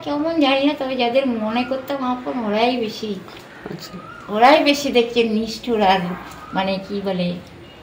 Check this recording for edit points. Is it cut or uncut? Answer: uncut